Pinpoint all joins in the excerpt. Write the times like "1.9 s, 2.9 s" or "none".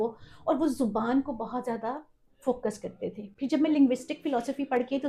none